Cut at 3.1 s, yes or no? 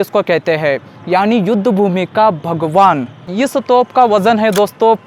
yes